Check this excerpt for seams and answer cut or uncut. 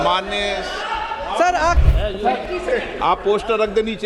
cut